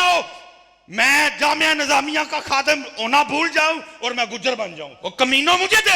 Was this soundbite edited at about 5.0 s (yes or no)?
yes